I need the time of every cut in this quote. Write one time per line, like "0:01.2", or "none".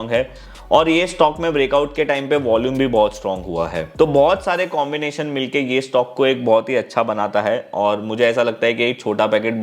0:03.8

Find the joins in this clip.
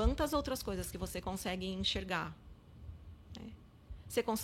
none

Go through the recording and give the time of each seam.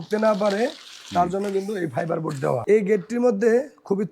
0:02.6

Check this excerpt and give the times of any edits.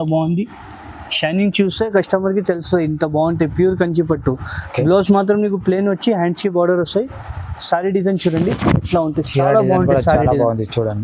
none

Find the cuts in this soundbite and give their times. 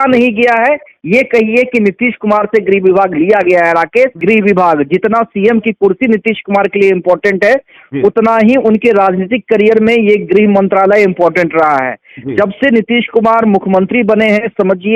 0:04.2

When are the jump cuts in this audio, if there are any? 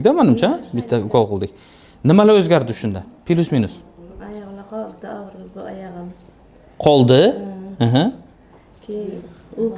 none

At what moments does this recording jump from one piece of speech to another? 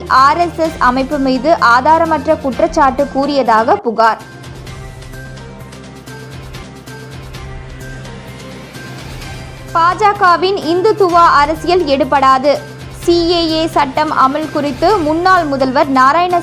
none

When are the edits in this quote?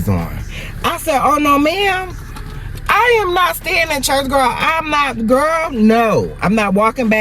none

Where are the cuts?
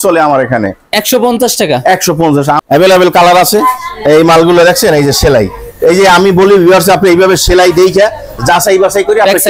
0:02.6

